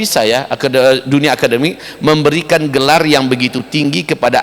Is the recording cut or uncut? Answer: uncut